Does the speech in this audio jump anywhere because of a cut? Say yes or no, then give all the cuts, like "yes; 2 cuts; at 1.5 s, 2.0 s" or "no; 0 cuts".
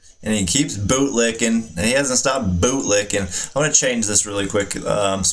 no; 0 cuts